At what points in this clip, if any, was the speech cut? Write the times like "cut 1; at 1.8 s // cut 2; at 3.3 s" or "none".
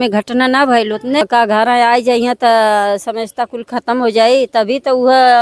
cut 1; at 1.2 s